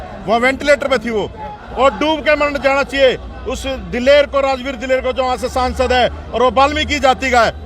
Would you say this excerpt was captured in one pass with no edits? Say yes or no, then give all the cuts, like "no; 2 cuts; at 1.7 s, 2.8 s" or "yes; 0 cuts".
no; 1 cut; at 1.6 s